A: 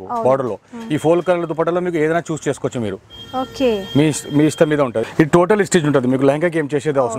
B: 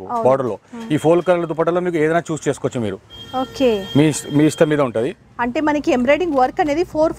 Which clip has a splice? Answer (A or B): A